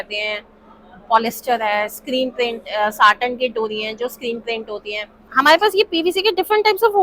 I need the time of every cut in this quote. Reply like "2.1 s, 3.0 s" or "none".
5.2 s

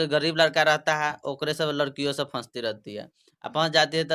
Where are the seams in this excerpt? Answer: none

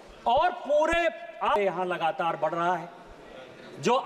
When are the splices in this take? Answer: 1.6 s

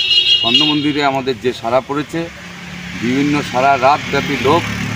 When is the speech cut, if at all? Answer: none

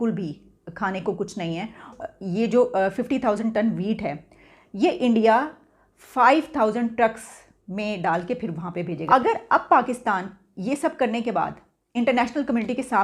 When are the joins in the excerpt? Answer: 1.9 s, 9.0 s

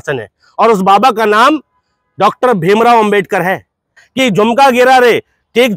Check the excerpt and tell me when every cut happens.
4.0 s

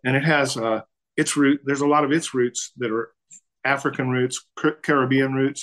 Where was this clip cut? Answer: 4.4 s

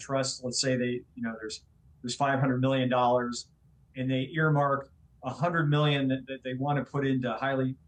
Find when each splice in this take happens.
none

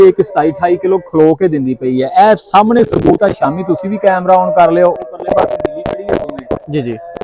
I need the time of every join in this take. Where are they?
none

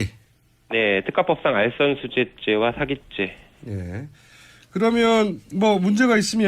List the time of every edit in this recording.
2.2 s

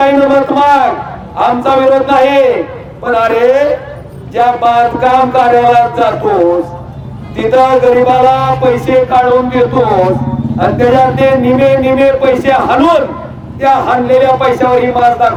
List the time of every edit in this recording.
none

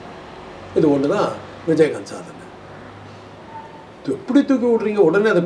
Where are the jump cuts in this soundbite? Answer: none

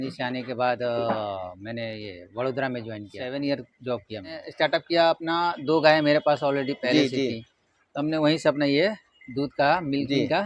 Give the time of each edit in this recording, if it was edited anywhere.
3.2 s, 4.4 s

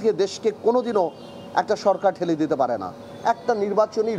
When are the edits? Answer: none

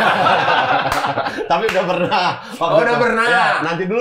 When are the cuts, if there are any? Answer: none

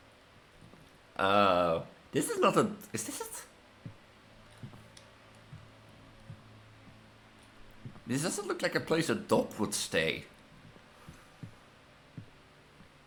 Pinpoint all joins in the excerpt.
none

